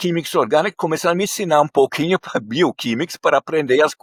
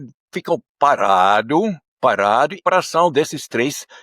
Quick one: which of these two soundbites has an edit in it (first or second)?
second